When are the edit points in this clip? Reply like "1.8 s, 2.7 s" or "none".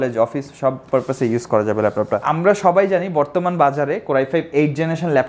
2.2 s